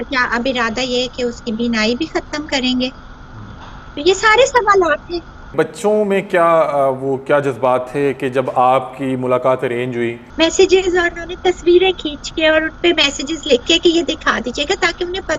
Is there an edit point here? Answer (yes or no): yes